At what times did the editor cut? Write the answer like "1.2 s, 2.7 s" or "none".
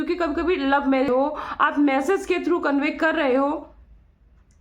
1.1 s